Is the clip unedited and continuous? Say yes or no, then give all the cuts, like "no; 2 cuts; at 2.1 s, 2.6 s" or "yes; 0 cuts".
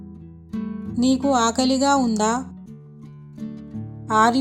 no; 1 cut; at 0.9 s